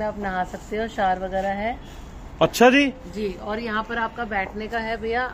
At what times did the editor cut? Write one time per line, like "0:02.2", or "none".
none